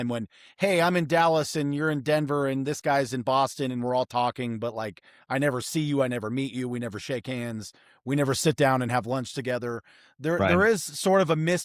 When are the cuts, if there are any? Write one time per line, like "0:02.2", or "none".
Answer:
none